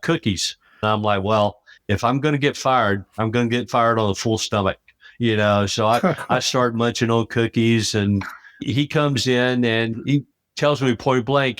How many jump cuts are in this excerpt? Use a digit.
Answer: 2